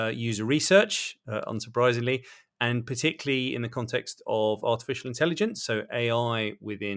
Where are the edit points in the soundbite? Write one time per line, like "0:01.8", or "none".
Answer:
none